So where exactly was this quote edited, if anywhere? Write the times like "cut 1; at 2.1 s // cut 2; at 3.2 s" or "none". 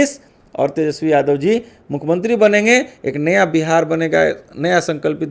none

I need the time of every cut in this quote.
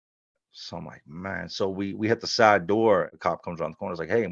cut 1; at 3.1 s

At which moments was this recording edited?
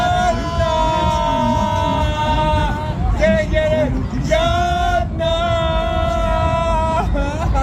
none

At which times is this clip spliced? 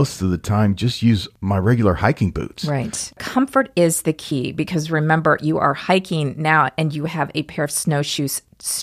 cut 1; at 1.3 s // cut 2; at 3.0 s

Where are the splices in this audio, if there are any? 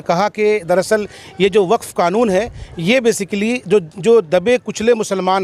none

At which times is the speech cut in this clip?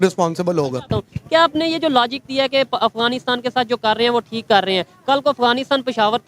cut 1; at 0.9 s

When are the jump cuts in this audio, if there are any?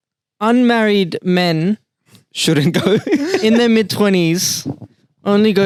none

